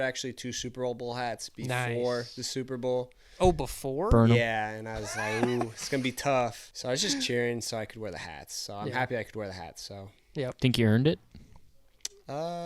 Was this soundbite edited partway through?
yes; 1 cut; at 6.7 s

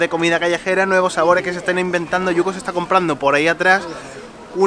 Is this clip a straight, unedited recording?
yes; 0 cuts

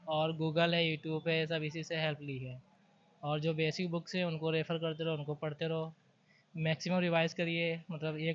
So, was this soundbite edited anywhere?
no; 0 cuts

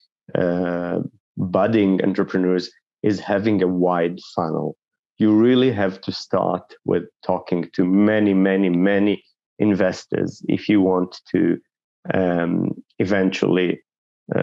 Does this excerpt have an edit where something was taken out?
no; 0 cuts

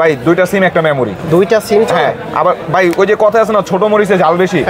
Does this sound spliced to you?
no; 0 cuts

